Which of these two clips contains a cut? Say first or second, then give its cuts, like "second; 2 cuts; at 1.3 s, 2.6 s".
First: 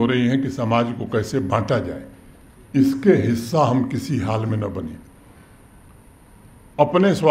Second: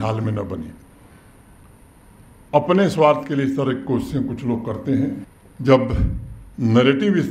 second; 1 cut; at 5.3 s